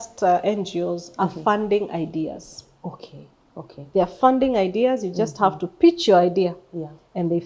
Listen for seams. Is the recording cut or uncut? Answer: uncut